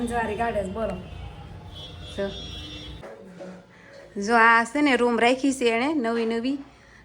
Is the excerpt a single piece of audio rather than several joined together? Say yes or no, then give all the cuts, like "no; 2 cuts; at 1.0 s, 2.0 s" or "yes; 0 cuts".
no; 1 cut; at 2.9 s